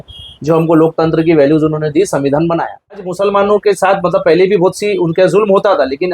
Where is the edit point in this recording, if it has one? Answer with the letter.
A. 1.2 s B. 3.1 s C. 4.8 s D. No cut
B